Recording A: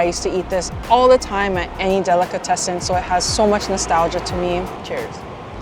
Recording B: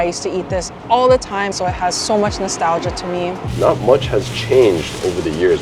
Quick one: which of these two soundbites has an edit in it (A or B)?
B